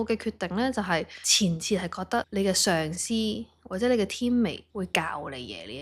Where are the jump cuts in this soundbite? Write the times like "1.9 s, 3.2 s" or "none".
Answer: 1.2 s, 2.3 s, 4.6 s